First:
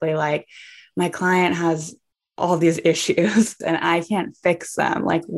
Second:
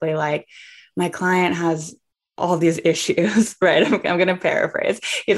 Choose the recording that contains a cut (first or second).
first